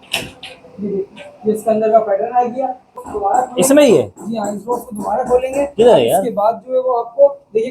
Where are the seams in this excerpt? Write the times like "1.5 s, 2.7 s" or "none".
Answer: 3.0 s

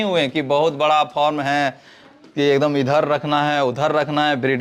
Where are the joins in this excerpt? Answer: none

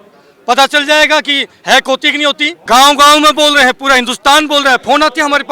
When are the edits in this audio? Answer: 2.5 s

